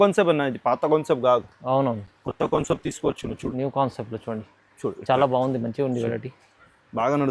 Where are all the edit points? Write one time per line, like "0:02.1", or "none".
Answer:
none